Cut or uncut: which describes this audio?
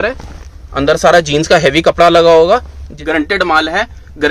cut